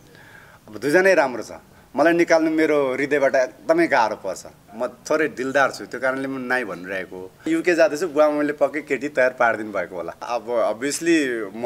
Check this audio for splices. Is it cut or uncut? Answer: cut